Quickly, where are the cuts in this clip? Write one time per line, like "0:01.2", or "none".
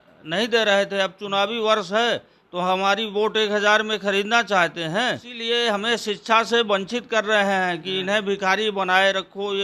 0:05.3